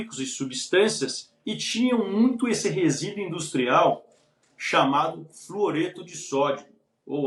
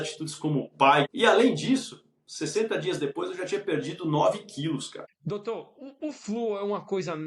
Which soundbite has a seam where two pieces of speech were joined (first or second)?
second